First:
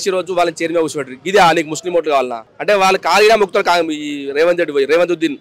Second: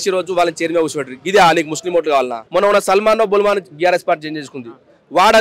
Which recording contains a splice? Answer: second; 1 cut; at 2.4 s

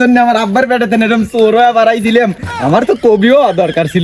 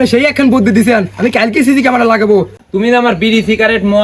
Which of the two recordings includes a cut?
second; 1 cut; at 2.6 s

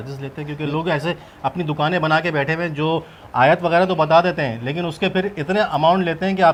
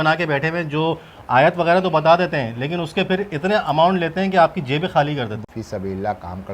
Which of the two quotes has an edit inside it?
second; 1 cut; at 5.4 s

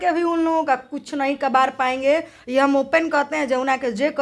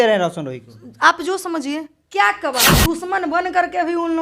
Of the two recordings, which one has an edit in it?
second; 1 cut; at 2.8 s

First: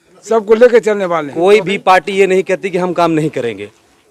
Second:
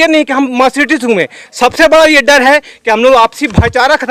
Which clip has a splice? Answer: first; 1 cut; at 1.3 s

